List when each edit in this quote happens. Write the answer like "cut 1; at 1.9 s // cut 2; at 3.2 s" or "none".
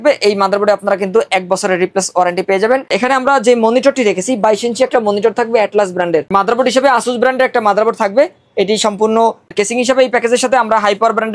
cut 1; at 2.9 s // cut 2; at 6.3 s // cut 3; at 9.5 s